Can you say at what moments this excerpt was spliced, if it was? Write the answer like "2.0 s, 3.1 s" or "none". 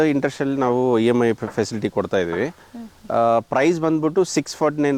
none